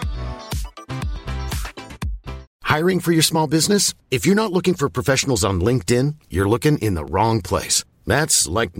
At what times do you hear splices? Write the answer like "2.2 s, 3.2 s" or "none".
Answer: 2.5 s